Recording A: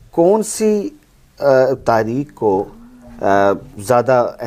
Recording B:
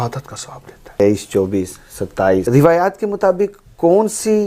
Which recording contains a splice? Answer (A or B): B